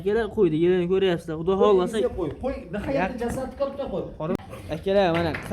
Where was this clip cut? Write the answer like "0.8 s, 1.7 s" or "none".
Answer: 4.4 s